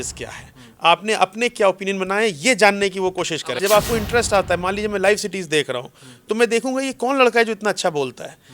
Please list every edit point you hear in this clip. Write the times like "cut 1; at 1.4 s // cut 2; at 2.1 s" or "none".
cut 1; at 3.6 s